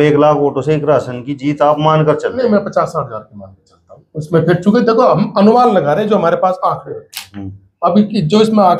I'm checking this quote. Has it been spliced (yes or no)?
no